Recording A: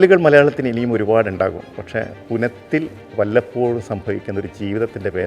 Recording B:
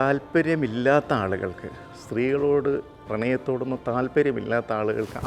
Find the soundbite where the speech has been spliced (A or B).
A